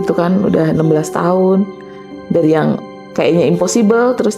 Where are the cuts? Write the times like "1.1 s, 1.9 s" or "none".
none